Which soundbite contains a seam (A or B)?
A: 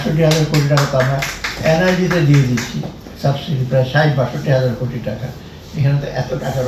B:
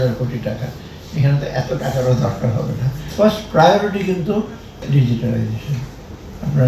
B